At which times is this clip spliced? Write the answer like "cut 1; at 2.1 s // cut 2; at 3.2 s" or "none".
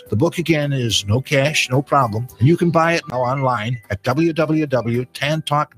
cut 1; at 3.1 s